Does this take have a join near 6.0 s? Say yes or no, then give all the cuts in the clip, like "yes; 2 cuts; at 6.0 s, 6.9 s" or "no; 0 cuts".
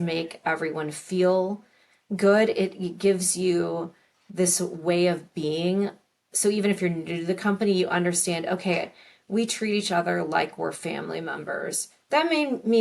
no; 0 cuts